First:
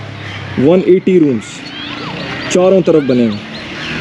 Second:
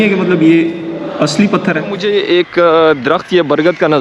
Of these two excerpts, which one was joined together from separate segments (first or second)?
second